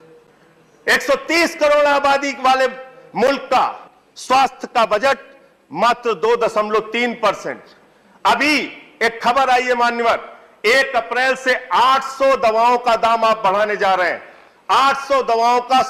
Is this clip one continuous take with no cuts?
yes; 0 cuts

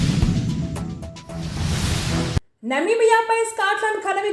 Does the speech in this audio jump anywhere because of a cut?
no; 0 cuts

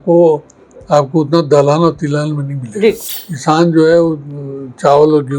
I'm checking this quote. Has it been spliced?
yes; 1 cut; at 3.1 s

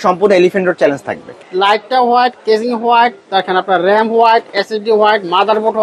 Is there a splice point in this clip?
yes; 1 cut; at 1.4 s

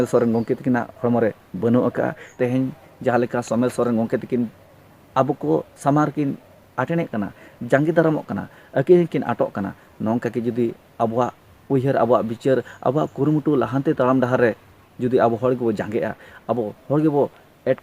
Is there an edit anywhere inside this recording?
yes; 1 cut; at 2.2 s

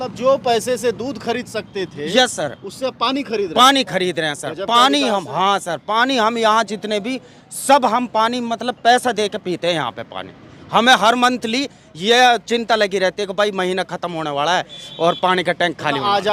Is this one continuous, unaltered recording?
yes; 0 cuts

